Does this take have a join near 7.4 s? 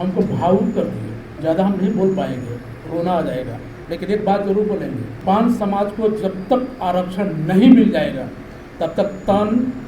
no; 3 cuts; at 1.3 s, 3.7 s, 5.1 s

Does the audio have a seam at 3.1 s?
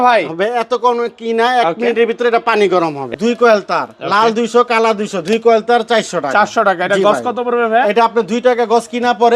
yes; 1 cut; at 3.1 s

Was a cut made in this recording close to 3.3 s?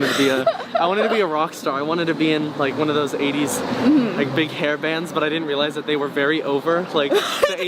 no; 0 cuts

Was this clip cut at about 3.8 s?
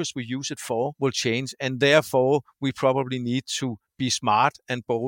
no; 1 cut; at 0.9 s

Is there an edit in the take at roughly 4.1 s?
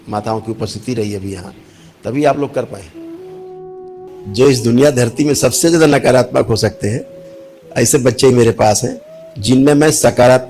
yes; 1 cut; at 4.1 s

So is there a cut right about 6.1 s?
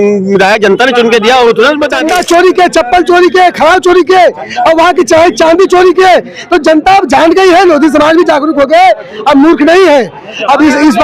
no; 1 cut; at 2.0 s

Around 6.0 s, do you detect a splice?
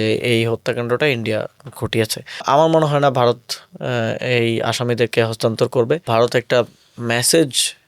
yes; 2 cuts; at 2.4 s, 6.0 s

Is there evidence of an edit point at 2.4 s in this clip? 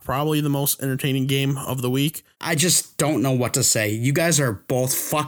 yes; 1 cut; at 2.4 s

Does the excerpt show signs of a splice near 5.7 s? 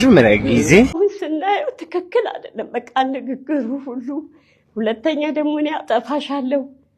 no; 1 cut; at 0.9 s

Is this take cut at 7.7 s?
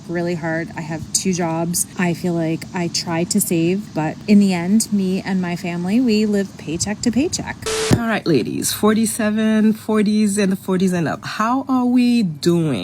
yes; 1 cut; at 7.7 s

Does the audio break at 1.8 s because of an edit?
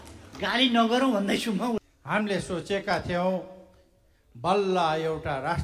yes; 1 cut; at 1.8 s

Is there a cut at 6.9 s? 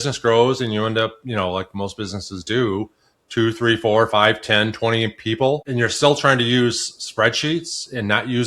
no; 1 cut; at 5.7 s

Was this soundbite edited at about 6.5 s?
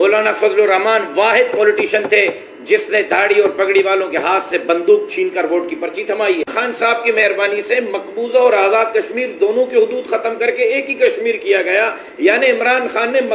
yes; 1 cut; at 6.5 s

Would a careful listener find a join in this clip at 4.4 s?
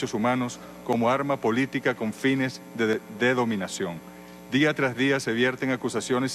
no; 1 cut; at 2.7 s

